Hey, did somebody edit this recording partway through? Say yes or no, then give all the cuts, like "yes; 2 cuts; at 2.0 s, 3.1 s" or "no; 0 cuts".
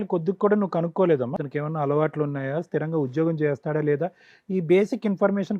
yes; 1 cut; at 1.4 s